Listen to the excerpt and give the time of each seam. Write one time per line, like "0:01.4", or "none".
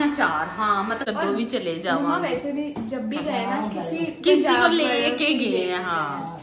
0:01.0